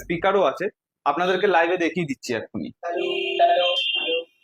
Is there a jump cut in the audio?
no; 0 cuts

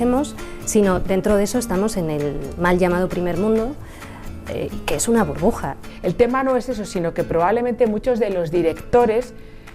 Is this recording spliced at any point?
yes; 1 cut; at 5.9 s

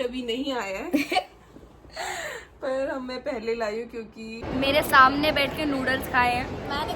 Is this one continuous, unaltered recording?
no; 1 cut; at 4.4 s

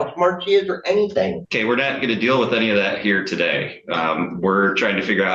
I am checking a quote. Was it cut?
no; 0 cuts

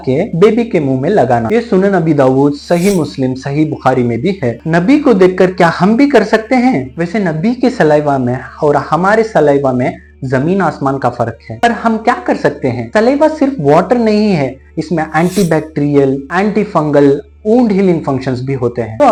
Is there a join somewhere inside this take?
no; 0 cuts

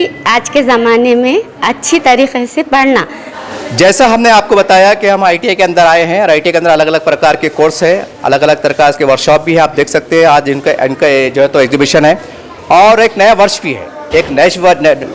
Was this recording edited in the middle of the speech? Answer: no; 0 cuts

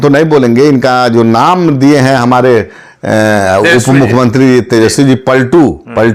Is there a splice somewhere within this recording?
no; 0 cuts

